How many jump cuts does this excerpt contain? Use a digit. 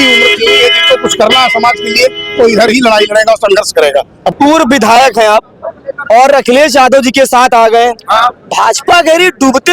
1